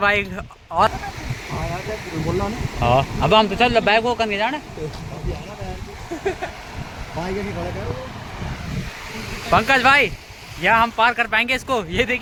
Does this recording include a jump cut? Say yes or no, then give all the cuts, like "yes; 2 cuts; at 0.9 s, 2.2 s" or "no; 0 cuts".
no; 0 cuts